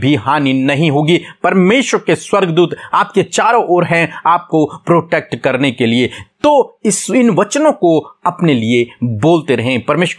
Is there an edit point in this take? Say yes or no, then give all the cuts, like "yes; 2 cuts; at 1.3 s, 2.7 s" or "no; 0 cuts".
no; 0 cuts